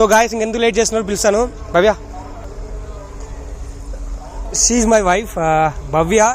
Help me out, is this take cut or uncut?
cut